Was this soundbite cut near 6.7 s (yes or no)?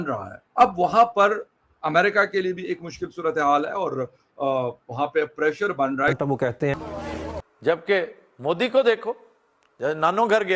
yes